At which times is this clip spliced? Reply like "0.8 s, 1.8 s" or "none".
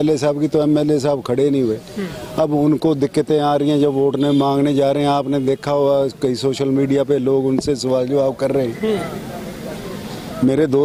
none

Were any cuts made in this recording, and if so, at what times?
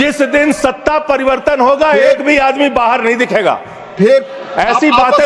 none

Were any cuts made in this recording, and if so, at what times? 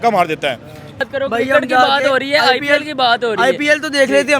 1.1 s

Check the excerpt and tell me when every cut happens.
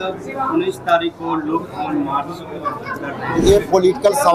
none

